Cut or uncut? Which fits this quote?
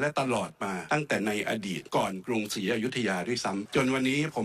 cut